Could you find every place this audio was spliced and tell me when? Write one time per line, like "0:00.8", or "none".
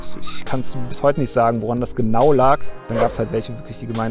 0:02.9